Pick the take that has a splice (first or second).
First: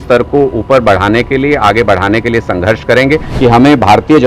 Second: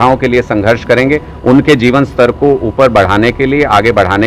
first